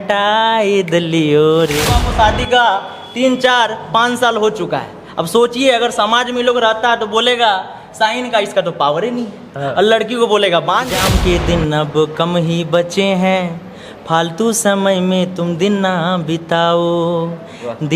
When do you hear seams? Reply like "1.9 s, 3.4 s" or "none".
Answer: 2.0 s, 10.9 s